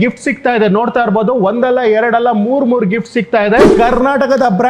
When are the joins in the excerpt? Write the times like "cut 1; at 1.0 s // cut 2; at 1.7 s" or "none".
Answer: cut 1; at 3.7 s